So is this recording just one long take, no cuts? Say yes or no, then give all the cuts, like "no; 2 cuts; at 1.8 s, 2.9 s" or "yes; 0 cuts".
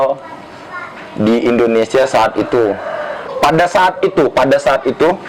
no; 1 cut; at 3.3 s